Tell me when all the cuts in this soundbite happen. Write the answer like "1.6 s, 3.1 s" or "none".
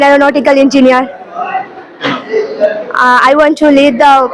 none